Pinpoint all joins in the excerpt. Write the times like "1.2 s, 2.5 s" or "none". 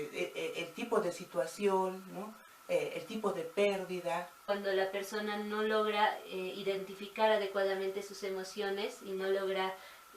4.4 s